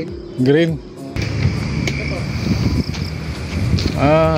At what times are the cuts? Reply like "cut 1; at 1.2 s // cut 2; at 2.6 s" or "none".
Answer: cut 1; at 1.3 s